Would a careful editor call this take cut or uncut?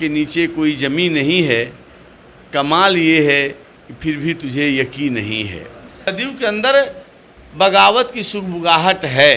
cut